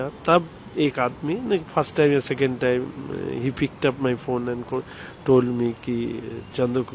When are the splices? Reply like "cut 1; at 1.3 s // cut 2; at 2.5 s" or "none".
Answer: none